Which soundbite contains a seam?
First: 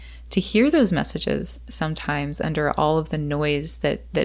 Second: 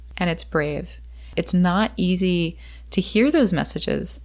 second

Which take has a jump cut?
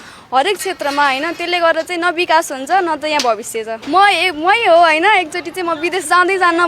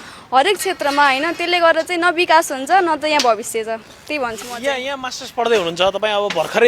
first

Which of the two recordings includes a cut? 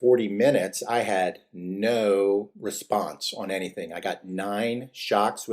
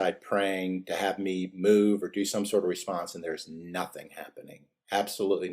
first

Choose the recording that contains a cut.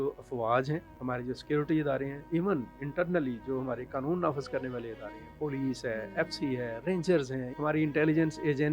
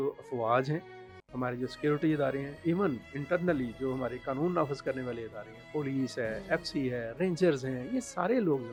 first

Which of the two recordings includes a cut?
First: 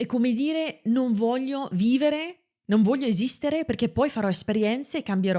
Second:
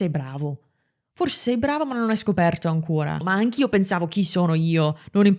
second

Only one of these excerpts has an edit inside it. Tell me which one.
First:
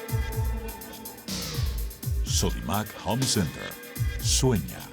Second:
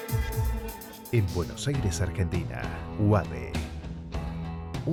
first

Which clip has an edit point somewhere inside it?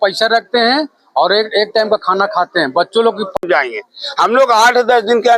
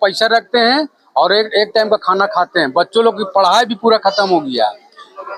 first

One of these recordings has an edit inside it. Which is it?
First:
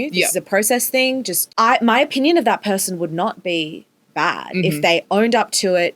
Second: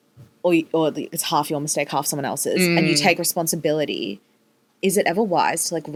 first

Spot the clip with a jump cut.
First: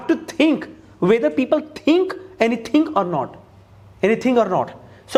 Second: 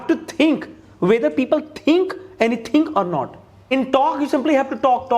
second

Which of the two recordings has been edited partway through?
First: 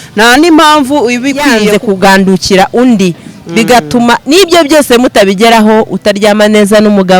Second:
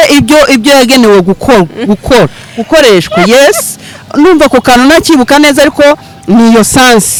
first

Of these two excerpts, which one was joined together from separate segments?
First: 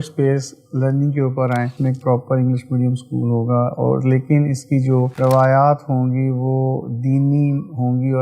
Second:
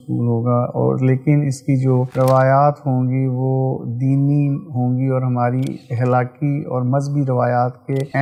first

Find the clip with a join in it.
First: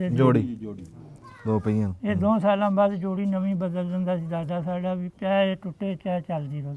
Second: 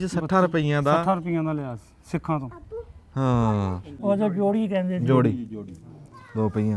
second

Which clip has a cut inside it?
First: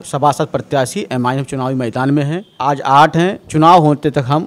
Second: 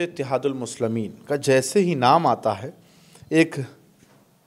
first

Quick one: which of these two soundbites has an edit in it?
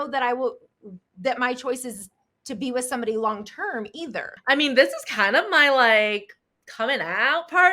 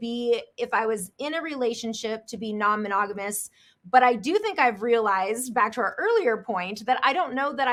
first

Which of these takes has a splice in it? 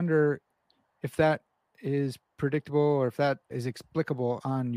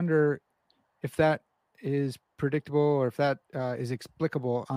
first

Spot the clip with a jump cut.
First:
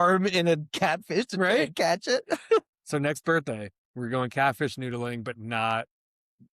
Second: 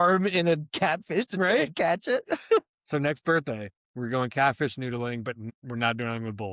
second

